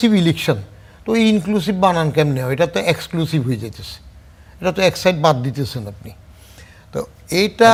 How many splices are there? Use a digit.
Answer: 0